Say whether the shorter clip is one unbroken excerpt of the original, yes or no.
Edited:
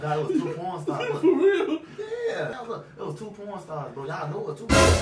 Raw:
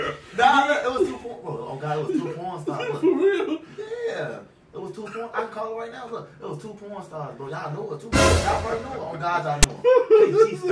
no